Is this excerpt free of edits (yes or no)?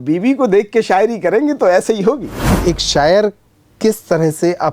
no